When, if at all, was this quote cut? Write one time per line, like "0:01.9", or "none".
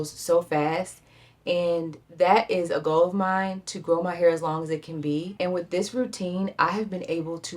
0:02.0